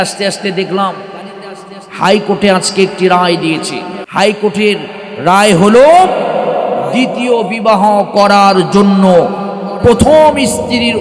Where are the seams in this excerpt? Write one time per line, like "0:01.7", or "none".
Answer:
0:04.0